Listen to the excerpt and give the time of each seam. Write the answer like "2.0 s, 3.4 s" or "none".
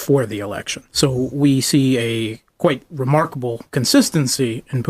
1.1 s